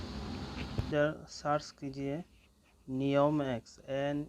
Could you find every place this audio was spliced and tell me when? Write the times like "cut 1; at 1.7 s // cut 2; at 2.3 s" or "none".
cut 1; at 0.9 s